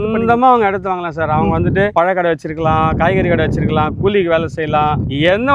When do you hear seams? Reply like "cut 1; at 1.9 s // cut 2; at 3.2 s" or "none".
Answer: none

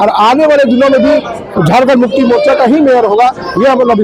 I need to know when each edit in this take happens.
none

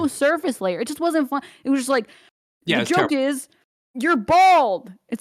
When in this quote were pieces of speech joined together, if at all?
none

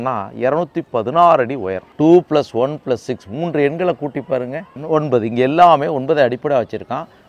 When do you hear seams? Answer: cut 1; at 1.8 s // cut 2; at 4.7 s

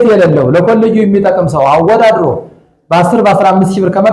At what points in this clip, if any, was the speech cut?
none

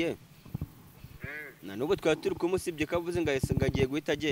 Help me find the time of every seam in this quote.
none

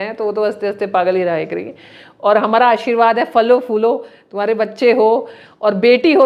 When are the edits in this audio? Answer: none

